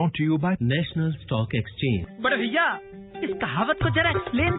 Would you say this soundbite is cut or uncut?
cut